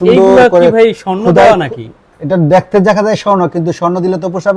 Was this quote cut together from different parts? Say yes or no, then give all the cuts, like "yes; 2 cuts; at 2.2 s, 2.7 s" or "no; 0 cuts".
no; 0 cuts